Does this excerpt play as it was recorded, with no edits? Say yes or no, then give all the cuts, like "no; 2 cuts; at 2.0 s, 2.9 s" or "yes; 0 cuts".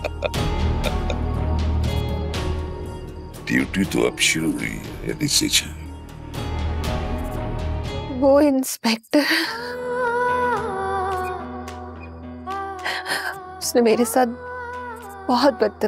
no; 1 cut; at 8.1 s